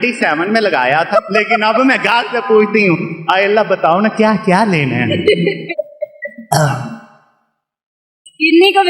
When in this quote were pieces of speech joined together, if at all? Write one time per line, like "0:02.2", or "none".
0:01.1
0:05.7